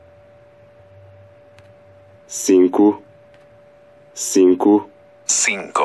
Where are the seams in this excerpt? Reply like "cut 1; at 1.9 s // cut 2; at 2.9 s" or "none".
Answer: cut 1; at 1.2 s